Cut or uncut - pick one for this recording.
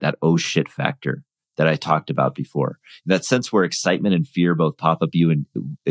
uncut